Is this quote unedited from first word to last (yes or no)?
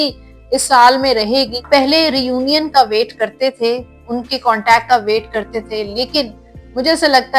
no